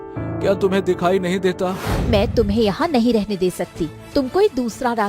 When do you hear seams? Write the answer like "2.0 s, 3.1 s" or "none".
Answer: 1.9 s